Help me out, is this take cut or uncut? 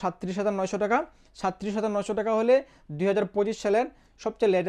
uncut